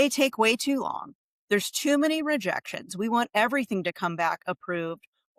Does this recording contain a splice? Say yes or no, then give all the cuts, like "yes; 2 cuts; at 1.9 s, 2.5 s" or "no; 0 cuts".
no; 0 cuts